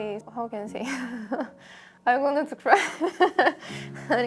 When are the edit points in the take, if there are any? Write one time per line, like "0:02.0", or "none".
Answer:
none